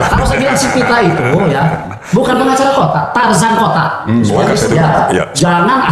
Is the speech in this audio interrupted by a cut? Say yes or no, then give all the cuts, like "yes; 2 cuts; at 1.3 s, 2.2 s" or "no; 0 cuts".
yes; 1 cut; at 4.6 s